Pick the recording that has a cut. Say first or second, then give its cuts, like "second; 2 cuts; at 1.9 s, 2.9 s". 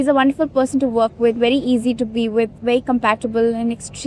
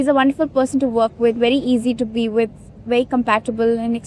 first; 1 cut; at 2.6 s